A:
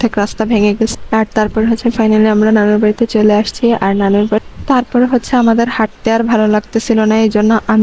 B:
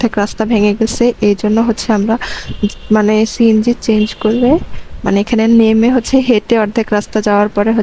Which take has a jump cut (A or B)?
A